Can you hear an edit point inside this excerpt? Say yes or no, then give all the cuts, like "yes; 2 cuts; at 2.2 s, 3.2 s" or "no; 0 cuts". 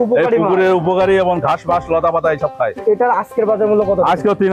yes; 1 cut; at 2.8 s